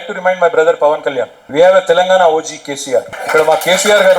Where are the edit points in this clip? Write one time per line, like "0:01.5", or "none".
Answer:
0:01.4
0:03.2